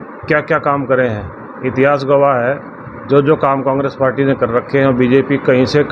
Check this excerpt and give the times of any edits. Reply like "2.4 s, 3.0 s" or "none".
none